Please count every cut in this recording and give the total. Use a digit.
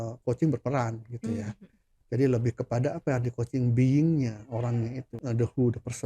1